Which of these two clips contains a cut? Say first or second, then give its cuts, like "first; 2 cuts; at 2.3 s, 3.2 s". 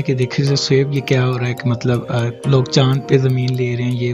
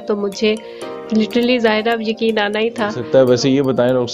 second; 1 cut; at 3.0 s